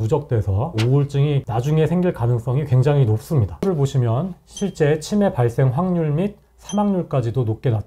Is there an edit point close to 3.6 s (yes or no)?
yes